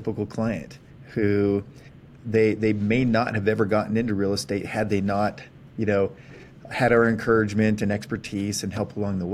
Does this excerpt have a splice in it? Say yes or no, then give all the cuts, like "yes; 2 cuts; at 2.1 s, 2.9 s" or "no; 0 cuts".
no; 0 cuts